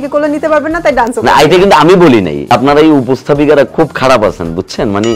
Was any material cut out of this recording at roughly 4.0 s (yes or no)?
no